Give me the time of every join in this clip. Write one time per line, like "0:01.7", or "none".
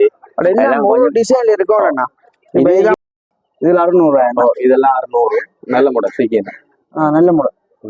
0:03.0